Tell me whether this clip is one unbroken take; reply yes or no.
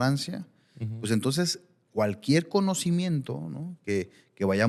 yes